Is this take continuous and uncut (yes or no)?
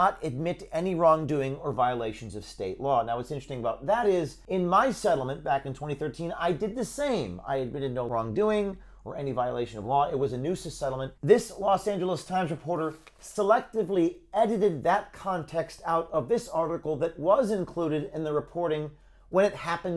yes